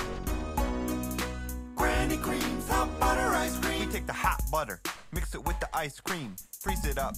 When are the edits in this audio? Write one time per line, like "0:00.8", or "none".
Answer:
none